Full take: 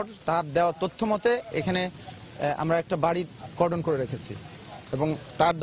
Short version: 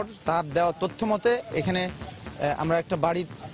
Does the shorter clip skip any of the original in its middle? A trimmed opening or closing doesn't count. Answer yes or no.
no